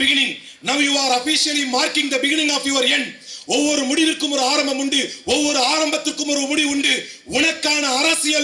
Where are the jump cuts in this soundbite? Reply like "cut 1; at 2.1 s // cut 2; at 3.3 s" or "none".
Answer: none